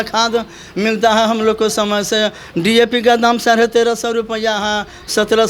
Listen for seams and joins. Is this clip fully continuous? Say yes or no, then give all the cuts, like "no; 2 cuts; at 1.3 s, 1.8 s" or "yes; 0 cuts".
yes; 0 cuts